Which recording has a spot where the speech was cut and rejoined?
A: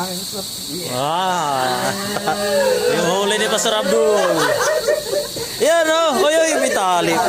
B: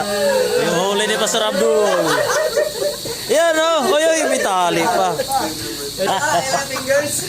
B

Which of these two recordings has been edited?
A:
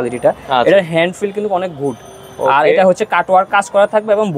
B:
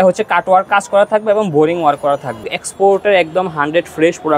B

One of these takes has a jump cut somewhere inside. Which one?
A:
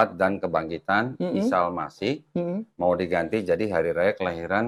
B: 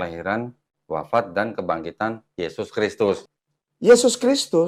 B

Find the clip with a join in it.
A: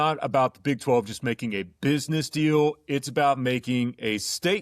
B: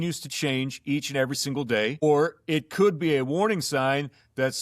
B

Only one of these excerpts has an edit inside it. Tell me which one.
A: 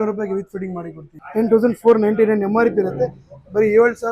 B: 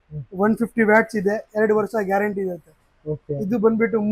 A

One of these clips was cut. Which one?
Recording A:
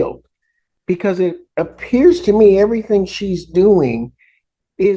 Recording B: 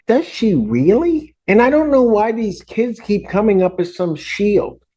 B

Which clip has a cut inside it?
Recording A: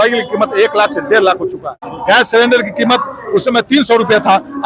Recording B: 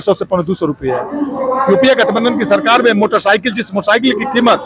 A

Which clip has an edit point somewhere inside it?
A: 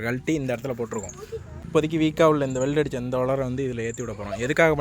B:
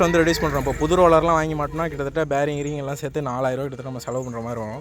A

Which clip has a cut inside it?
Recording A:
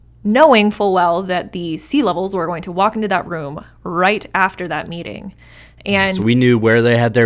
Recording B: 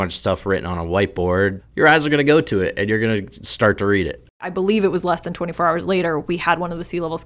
B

